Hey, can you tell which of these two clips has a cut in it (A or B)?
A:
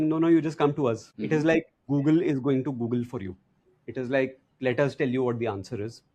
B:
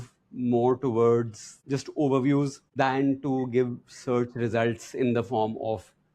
A